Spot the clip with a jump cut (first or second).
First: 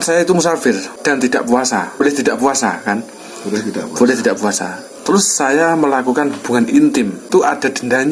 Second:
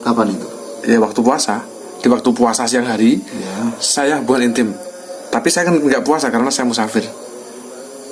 first